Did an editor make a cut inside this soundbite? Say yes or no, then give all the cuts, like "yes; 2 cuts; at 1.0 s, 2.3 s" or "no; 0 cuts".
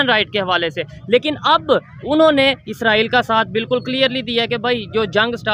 no; 0 cuts